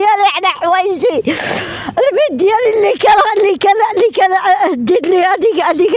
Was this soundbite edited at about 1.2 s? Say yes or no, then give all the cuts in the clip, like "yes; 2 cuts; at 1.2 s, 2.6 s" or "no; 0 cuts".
no; 0 cuts